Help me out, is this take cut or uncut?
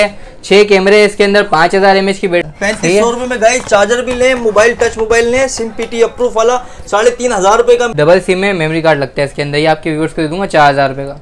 cut